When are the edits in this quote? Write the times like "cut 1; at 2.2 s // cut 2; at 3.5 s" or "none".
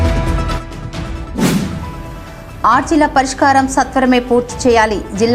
cut 1; at 1.7 s